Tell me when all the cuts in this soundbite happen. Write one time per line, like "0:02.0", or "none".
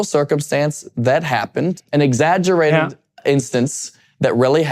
0:01.8